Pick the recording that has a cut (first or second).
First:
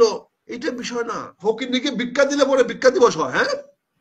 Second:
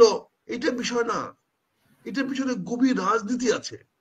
first